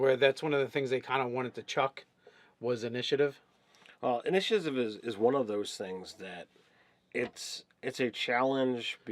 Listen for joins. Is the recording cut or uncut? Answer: cut